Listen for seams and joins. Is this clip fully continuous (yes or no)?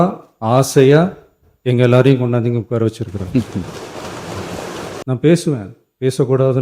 no